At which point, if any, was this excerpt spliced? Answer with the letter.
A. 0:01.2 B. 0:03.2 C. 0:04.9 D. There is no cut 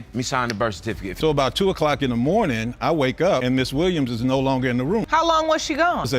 A